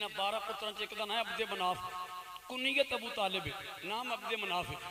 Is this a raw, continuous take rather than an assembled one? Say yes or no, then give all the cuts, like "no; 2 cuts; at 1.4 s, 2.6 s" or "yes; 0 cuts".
yes; 0 cuts